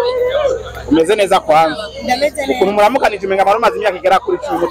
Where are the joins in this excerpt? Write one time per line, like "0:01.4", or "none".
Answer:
none

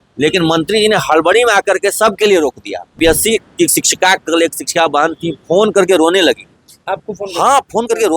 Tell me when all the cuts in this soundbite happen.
0:02.9

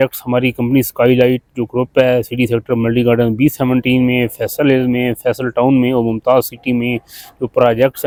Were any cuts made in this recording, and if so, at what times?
none

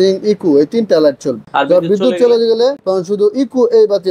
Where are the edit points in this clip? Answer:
0:01.4
0:02.8

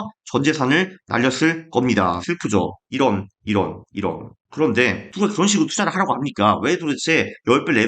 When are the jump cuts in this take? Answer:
0:02.2
0:05.0

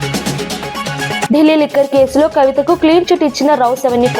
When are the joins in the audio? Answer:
0:01.0

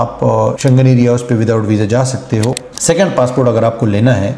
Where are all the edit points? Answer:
0:02.6

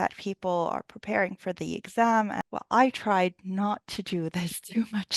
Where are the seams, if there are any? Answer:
0:02.4

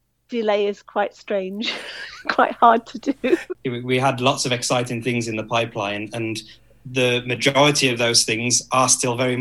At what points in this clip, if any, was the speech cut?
0:03.5

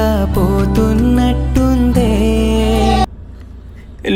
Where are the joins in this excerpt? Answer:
none

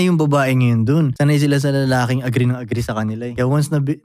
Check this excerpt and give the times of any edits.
0:01.1
0:03.3

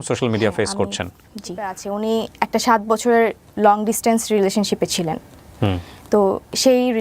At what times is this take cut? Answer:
0:01.8

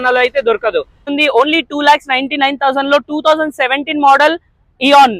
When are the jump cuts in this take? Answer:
0:01.1

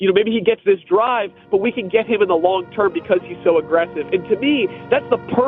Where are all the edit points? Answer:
none

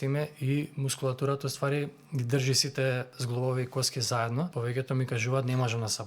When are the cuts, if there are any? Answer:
0:04.5

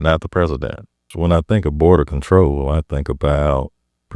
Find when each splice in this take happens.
0:01.1

